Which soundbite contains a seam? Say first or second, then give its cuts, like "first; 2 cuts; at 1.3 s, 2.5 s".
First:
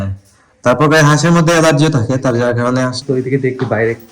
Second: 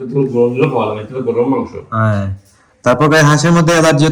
first; 1 cut; at 3.0 s